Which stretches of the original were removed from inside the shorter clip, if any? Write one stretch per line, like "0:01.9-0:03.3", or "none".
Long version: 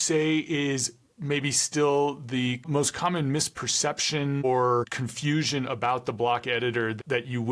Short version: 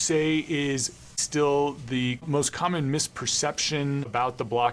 0:01.1-0:01.5
0:04.4-0:05.7